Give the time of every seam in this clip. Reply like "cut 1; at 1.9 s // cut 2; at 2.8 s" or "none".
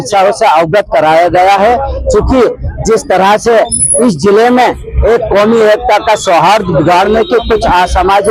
none